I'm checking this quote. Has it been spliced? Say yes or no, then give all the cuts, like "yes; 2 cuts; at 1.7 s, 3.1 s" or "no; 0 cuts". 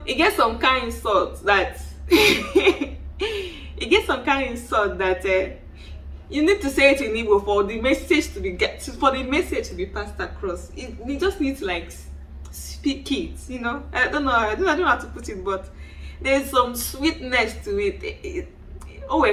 no; 0 cuts